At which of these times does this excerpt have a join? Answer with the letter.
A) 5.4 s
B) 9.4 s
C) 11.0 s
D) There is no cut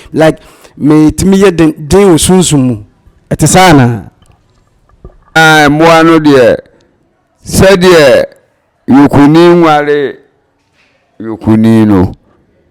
A